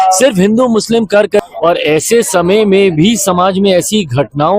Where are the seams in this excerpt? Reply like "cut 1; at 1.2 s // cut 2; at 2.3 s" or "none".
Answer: cut 1; at 1.5 s